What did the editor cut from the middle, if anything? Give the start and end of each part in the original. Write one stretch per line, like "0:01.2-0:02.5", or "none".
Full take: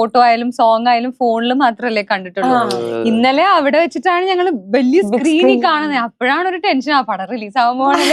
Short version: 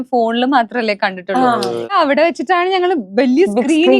0:03.0-0:03.5